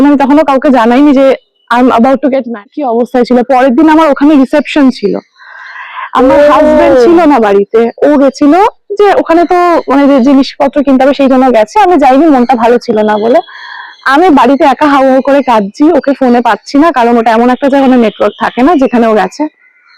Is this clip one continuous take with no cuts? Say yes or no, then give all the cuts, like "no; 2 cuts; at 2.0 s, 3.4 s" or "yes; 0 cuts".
no; 1 cut; at 2.7 s